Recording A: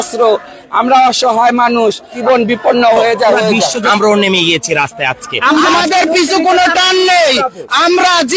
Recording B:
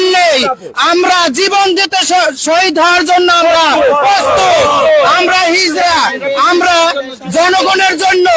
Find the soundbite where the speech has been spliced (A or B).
A